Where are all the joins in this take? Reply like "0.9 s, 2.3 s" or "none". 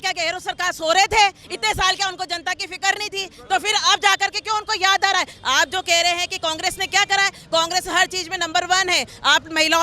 5.3 s